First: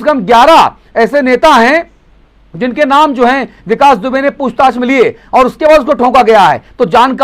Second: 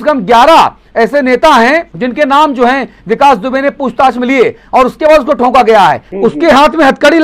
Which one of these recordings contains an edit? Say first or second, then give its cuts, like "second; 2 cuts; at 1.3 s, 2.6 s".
second; 2 cuts; at 1.9 s, 6.1 s